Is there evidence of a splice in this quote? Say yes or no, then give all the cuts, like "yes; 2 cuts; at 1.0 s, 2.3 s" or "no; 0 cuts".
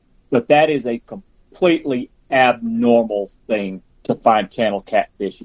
yes; 1 cut; at 3.8 s